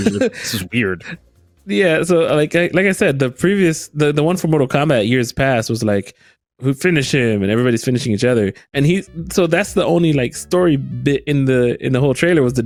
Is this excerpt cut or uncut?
uncut